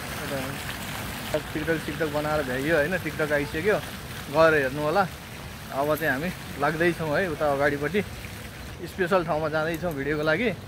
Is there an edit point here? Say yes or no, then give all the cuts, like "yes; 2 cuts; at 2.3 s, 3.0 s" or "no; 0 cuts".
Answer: yes; 2 cuts; at 1.3 s, 8.8 s